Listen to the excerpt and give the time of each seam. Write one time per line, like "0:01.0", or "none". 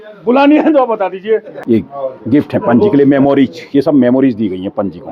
0:01.5